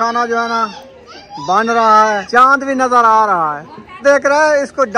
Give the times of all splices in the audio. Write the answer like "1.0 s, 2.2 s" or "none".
2.2 s, 4.0 s